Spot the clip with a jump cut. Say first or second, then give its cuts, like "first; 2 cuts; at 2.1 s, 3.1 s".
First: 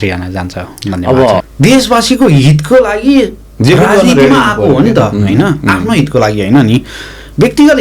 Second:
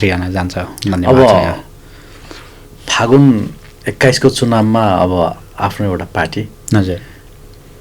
first; 1 cut; at 1.5 s